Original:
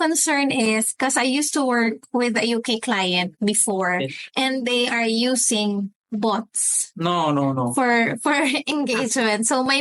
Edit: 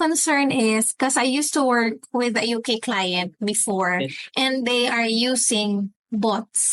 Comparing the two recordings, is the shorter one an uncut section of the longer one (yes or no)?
yes